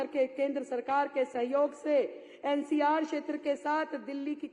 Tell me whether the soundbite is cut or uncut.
uncut